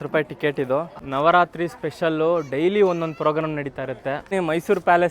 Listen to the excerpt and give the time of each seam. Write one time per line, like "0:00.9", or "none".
0:01.0
0:04.3